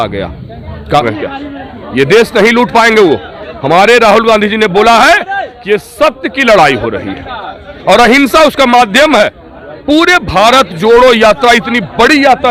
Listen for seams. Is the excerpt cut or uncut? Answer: uncut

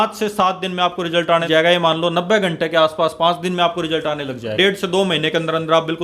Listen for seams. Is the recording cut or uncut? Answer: cut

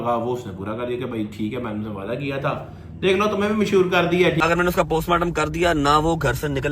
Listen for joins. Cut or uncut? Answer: cut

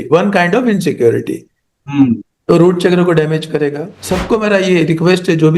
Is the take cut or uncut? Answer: cut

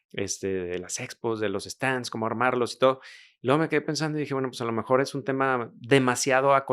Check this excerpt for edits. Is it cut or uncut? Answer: uncut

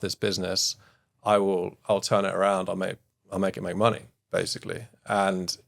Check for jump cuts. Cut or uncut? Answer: uncut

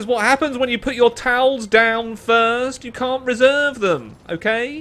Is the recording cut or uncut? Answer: uncut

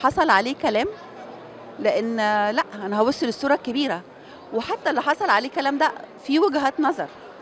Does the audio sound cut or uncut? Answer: uncut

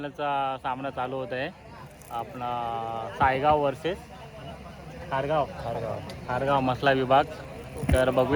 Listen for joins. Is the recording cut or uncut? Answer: uncut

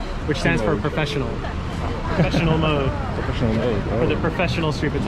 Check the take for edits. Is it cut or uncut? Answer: cut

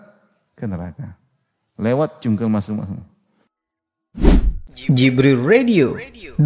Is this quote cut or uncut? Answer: cut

